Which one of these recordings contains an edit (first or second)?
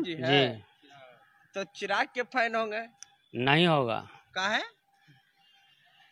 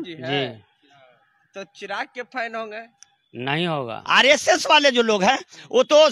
second